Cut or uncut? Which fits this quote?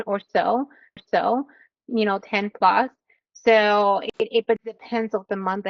uncut